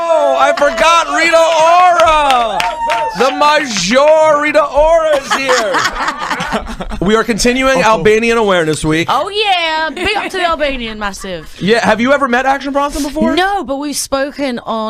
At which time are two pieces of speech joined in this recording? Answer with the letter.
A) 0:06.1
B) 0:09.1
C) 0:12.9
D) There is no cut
C